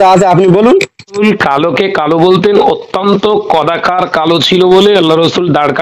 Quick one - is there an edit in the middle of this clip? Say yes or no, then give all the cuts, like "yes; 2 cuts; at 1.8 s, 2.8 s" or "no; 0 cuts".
yes; 1 cut; at 1.2 s